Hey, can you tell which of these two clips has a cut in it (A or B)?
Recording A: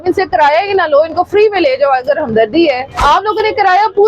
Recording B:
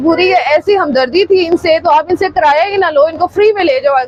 A